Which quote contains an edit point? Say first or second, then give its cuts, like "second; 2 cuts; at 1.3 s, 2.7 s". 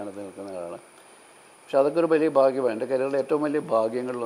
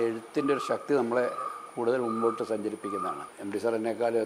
second; 1 cut; at 3.3 s